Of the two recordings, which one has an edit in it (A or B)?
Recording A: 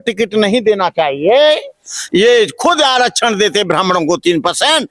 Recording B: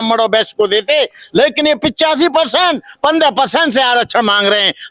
A